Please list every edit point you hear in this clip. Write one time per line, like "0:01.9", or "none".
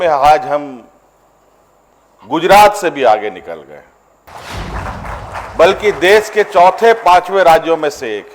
0:04.3